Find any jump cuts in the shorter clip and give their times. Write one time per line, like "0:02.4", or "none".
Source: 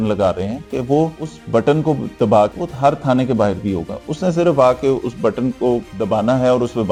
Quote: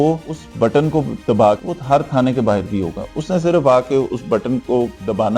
none